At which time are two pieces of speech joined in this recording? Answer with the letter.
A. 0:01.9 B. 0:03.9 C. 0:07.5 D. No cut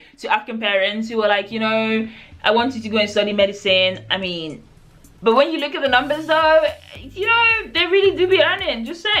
D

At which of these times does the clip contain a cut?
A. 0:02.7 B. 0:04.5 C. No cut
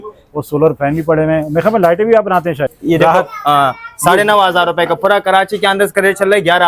A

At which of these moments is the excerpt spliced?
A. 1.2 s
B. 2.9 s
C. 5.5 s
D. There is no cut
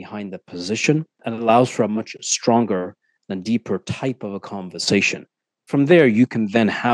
A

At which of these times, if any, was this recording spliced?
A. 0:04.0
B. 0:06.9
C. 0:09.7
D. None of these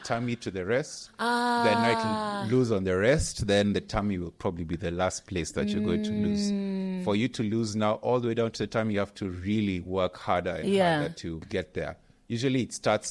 D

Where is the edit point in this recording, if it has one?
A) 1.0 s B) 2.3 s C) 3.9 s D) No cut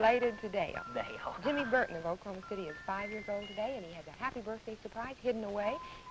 C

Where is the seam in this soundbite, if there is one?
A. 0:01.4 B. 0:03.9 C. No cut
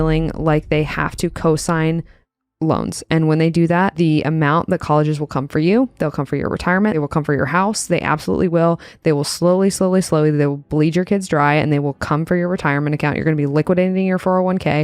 B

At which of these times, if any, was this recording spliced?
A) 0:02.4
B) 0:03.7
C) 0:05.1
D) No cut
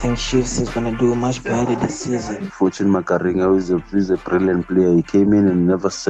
A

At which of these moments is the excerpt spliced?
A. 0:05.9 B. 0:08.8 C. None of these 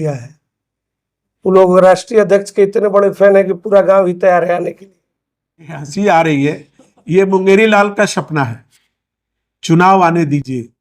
A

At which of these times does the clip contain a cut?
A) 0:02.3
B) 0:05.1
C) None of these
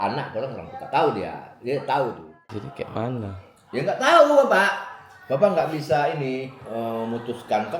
A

